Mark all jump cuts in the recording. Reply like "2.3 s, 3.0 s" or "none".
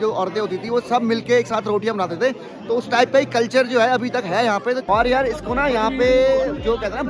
4.8 s